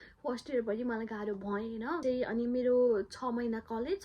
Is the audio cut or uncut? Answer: cut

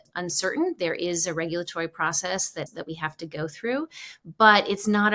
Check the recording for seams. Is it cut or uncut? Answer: cut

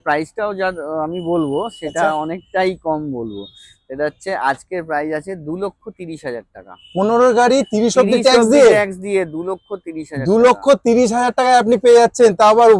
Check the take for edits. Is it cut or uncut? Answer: uncut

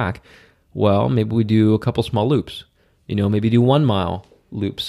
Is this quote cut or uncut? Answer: uncut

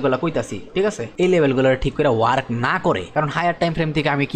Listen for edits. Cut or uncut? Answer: cut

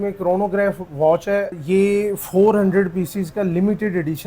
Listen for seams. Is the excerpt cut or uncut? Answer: cut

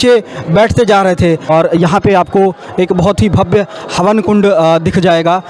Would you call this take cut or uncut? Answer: cut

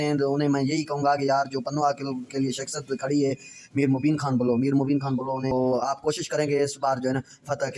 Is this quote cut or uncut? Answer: cut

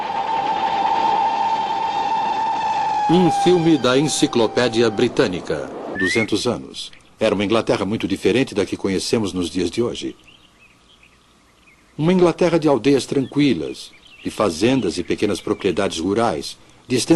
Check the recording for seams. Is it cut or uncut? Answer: uncut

